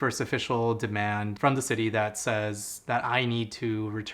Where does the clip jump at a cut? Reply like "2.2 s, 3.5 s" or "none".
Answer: 1.3 s